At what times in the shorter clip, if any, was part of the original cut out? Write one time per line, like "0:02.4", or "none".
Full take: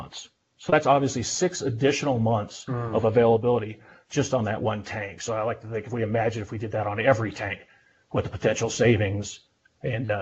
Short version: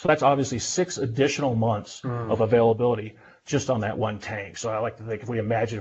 none